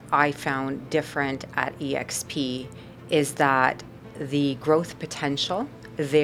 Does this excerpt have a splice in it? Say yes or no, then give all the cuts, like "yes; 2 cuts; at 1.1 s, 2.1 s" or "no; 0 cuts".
no; 0 cuts